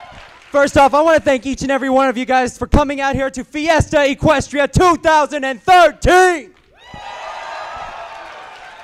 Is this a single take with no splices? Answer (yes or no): yes